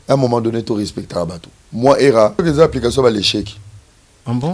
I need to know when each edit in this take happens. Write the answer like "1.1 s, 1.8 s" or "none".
2.3 s